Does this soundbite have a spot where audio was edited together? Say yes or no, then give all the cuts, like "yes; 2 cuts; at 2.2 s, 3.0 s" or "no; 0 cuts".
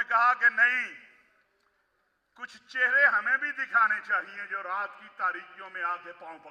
no; 0 cuts